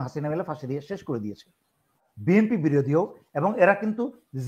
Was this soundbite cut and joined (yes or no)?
yes